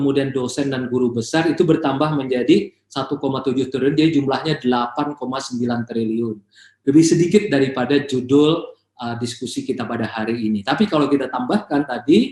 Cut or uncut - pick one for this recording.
uncut